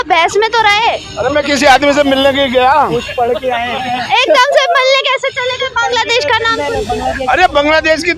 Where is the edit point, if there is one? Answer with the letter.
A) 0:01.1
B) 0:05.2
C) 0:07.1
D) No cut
D